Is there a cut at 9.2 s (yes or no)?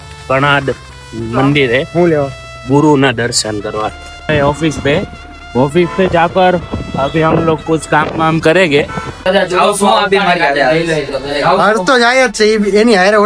yes